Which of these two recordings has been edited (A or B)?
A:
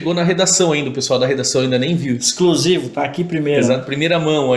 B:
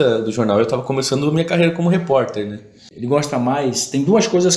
B